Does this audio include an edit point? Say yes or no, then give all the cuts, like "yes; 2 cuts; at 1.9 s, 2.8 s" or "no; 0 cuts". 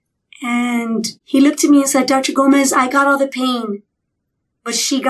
yes; 1 cut; at 1.2 s